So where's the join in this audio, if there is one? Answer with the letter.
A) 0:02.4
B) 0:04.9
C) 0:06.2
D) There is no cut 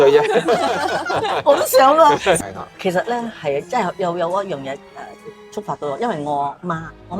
A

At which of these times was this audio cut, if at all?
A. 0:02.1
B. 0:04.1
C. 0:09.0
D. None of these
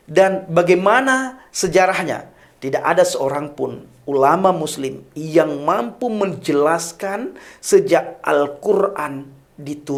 D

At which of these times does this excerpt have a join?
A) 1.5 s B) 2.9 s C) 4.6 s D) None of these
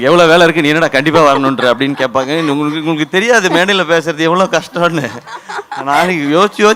D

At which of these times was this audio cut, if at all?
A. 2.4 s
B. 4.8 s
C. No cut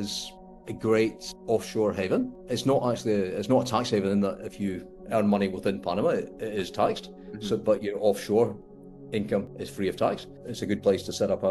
C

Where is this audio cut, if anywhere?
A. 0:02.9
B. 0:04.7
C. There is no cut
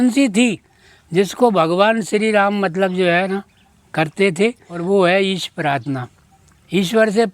B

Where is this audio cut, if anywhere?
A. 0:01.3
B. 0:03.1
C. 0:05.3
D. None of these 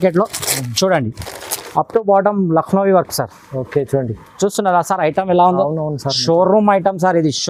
D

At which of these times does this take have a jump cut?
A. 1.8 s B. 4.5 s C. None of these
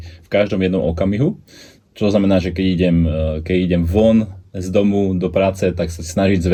C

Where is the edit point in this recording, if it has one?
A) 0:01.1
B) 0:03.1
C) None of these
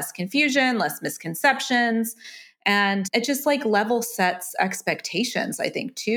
B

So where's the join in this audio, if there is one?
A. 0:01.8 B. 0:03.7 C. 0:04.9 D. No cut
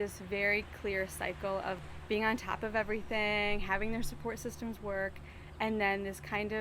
A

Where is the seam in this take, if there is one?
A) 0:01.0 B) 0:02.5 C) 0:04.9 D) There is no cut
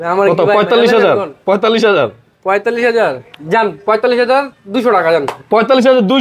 D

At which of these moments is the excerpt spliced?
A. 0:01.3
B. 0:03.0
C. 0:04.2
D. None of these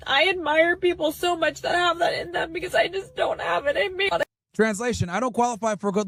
D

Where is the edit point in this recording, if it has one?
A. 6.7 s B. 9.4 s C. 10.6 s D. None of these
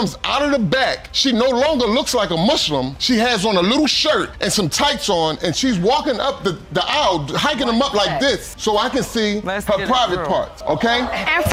D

